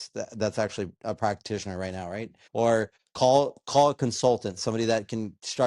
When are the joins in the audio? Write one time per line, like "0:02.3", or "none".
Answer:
0:02.3
0:03.0